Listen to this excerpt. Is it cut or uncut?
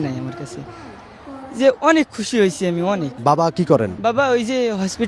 cut